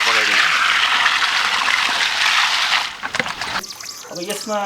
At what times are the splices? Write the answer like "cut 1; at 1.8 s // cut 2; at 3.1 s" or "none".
cut 1; at 3.6 s

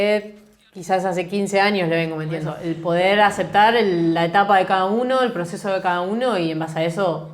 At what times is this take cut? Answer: cut 1; at 2.5 s

